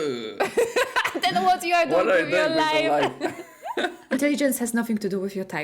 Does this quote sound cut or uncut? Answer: uncut